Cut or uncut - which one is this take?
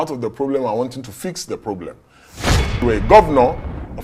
cut